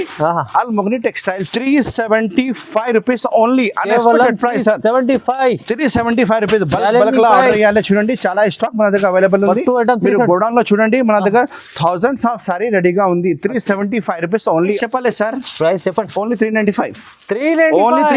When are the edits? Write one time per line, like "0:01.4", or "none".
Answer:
0:01.5
0:14.8